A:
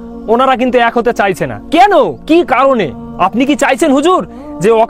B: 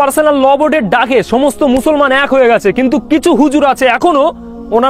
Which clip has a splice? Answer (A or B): A